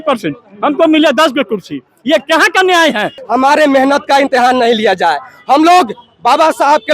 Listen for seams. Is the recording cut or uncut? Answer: cut